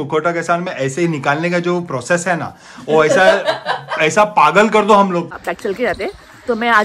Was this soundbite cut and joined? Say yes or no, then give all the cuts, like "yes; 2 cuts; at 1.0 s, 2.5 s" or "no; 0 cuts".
yes; 1 cut; at 5.3 s